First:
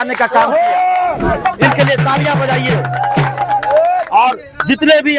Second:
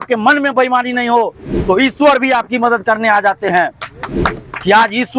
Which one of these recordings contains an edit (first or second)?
second